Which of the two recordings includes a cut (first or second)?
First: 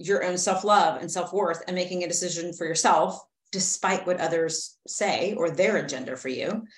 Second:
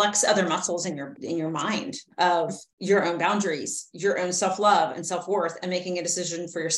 second